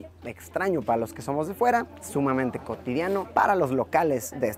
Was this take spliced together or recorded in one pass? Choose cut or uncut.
uncut